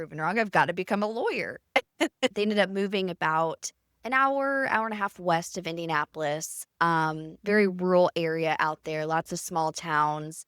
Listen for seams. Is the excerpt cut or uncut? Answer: cut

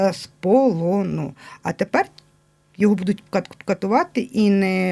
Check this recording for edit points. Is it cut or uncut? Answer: uncut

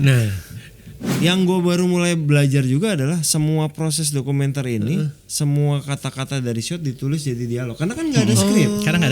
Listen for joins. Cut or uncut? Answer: cut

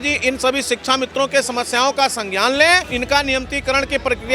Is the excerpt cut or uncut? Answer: cut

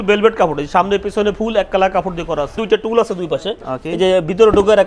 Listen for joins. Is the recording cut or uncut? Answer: cut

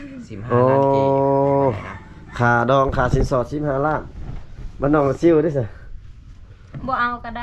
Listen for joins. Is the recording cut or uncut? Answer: uncut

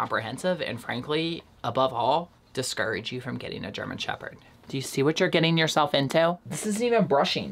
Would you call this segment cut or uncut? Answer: cut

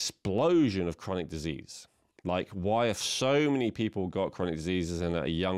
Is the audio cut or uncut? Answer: uncut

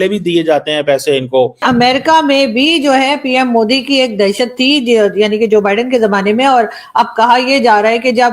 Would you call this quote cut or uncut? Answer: cut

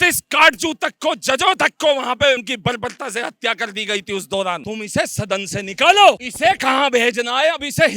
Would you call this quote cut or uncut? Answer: cut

